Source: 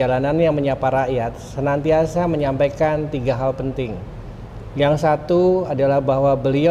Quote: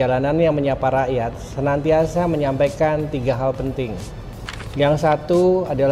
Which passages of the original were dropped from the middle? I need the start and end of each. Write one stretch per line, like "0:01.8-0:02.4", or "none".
none